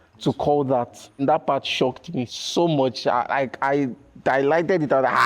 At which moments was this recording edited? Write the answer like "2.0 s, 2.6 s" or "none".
1.2 s